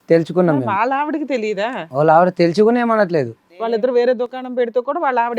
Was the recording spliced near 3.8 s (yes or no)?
yes